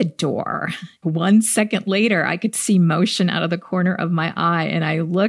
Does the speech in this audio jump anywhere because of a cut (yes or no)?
yes